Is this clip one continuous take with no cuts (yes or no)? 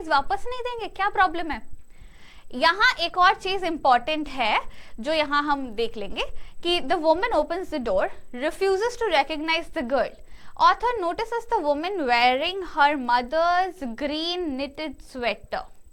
yes